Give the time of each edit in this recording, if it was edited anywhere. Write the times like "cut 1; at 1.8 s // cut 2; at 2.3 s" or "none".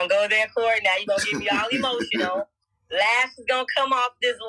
none